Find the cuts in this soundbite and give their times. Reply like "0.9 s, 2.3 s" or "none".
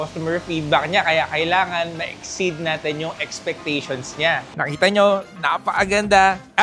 4.5 s